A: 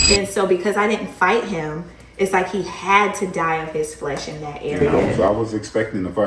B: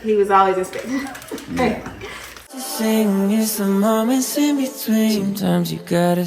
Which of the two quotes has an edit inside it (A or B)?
B